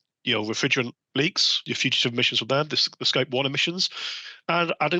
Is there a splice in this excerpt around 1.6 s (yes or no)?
yes